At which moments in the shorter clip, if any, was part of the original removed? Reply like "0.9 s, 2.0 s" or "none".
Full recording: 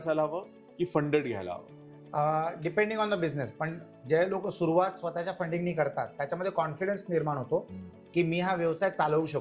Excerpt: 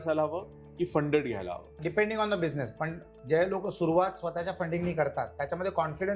1.8 s